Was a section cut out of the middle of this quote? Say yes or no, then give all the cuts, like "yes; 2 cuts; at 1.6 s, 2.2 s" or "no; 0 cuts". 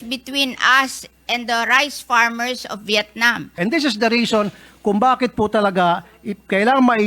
yes; 1 cut; at 3.5 s